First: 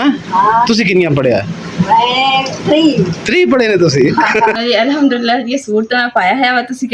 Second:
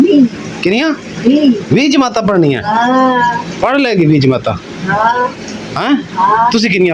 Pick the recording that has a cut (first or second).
first